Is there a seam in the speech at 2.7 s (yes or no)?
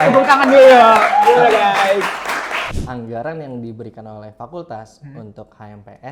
yes